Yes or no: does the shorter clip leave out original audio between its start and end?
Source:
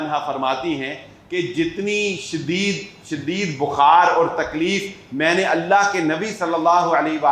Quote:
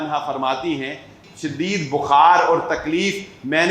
yes